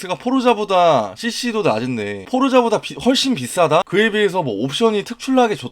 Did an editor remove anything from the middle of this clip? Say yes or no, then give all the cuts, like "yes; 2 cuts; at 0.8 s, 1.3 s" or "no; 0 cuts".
yes; 1 cut; at 3.9 s